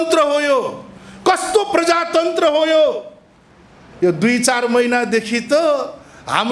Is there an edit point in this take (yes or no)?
no